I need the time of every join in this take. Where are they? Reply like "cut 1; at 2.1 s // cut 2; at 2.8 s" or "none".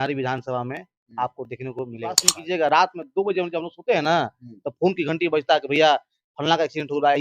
cut 1; at 2.3 s